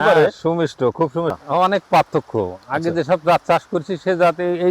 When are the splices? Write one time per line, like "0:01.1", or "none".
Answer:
0:01.3